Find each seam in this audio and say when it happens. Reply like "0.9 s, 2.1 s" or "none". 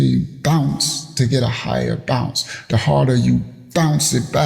none

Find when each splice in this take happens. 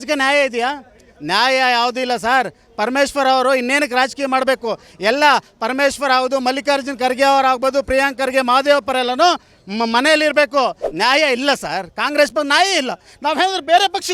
10.8 s

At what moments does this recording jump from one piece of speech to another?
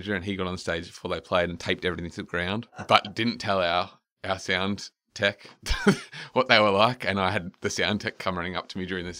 2.9 s, 5.6 s

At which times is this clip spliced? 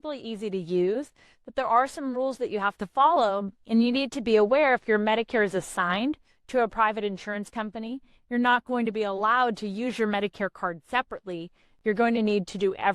none

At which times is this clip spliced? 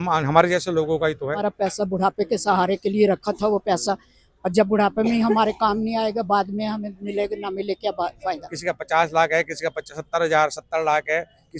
1.5 s, 8.5 s

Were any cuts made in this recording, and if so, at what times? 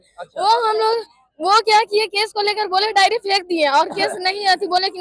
none

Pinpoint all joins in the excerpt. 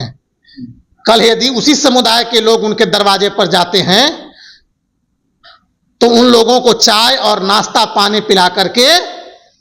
none

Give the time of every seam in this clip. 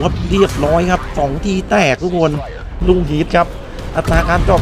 2.7 s

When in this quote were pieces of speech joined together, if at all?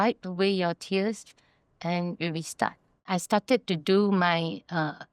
3.0 s

